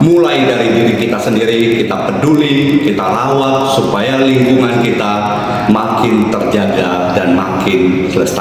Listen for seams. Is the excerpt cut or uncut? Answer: uncut